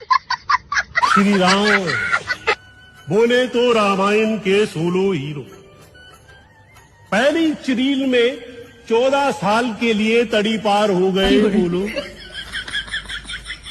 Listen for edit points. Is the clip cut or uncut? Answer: cut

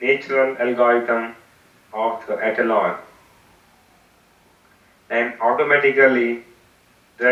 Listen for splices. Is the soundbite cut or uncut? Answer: uncut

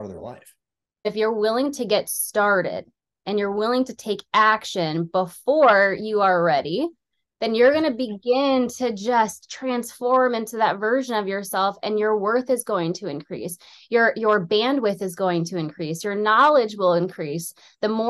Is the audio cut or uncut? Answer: cut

